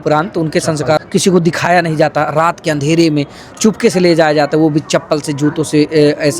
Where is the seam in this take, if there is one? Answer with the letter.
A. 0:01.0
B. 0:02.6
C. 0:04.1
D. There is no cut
A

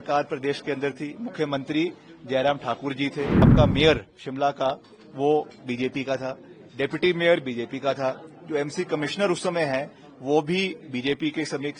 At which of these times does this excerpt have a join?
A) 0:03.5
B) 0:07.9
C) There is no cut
A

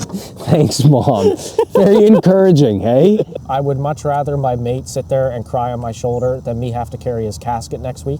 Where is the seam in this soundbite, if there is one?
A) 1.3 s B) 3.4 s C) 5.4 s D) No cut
B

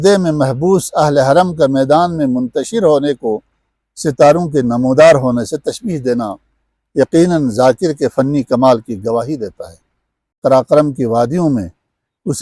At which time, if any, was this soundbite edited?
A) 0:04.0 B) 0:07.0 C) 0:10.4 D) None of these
C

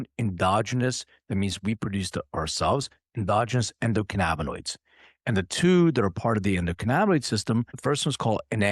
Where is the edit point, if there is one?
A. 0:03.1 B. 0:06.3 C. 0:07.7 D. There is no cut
C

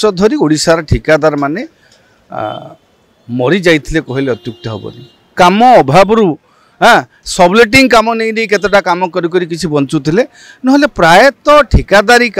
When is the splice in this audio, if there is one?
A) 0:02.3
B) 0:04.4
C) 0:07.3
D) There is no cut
D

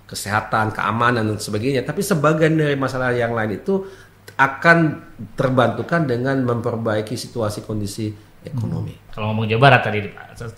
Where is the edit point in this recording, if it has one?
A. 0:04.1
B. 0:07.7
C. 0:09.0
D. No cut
C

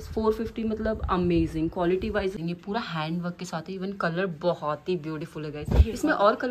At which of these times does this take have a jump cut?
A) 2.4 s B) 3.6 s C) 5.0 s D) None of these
A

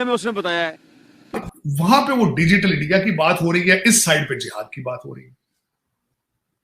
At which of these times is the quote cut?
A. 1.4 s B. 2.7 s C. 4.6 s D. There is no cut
A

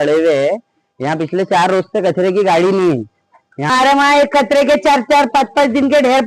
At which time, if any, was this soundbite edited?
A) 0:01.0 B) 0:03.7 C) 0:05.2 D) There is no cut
B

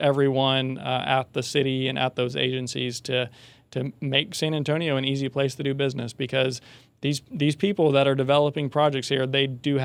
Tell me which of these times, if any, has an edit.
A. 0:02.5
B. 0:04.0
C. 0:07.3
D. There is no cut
D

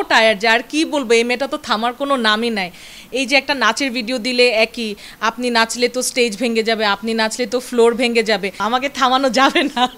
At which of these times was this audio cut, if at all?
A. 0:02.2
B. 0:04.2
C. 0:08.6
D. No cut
C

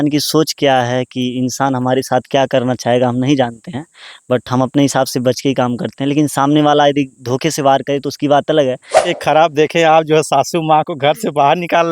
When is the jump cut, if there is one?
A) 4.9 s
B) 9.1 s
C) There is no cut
B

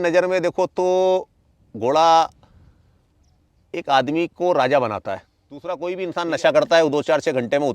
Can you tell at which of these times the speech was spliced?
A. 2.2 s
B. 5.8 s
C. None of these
B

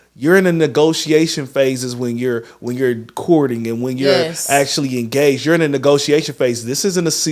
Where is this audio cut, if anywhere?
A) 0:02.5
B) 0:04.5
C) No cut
C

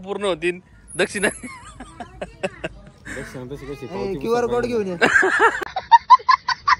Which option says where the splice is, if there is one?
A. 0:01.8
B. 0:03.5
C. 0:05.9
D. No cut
D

